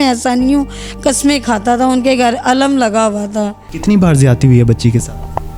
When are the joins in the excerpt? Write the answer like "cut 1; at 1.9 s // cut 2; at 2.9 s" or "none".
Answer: cut 1; at 3.7 s

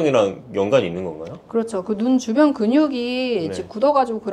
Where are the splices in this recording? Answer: none

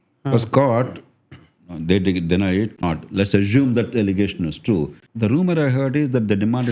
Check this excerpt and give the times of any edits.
cut 1; at 2.8 s // cut 2; at 5.0 s

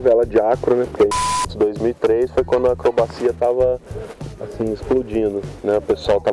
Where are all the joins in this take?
cut 1; at 1.2 s

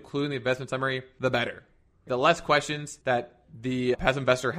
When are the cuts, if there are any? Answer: cut 1; at 1.1 s // cut 2; at 2.8 s

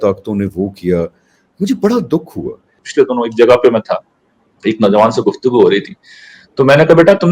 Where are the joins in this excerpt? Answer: cut 1; at 2.8 s

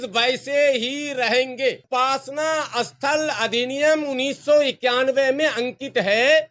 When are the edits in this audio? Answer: none

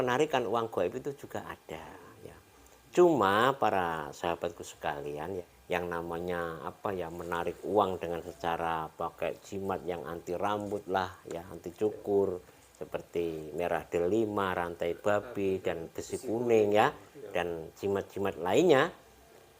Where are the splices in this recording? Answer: cut 1; at 5.5 s

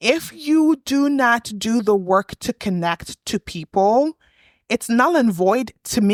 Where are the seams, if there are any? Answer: none

